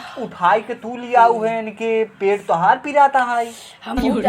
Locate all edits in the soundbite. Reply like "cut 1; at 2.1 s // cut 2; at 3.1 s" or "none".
none